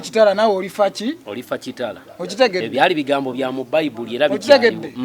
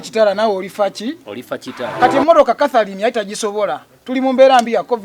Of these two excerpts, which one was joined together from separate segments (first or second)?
second